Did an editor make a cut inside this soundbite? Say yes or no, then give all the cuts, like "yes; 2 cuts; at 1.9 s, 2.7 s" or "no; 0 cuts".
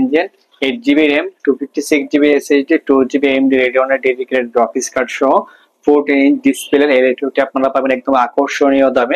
no; 0 cuts